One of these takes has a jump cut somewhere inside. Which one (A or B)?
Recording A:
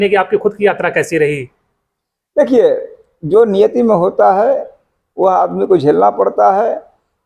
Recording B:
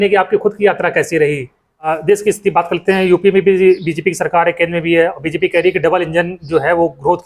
B